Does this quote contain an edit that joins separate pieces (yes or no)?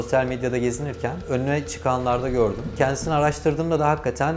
yes